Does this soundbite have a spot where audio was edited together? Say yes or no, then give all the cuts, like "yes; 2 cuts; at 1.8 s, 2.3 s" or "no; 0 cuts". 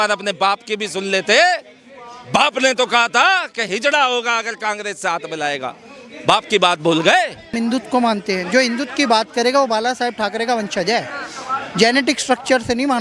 yes; 1 cut; at 7.5 s